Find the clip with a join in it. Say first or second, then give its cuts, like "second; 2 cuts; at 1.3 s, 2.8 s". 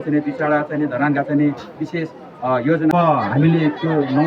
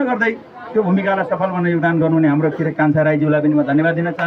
first; 1 cut; at 2.9 s